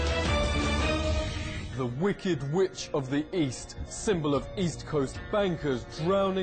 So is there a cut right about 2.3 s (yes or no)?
no